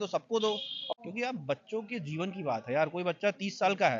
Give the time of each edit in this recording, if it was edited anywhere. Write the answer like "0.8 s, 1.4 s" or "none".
0.9 s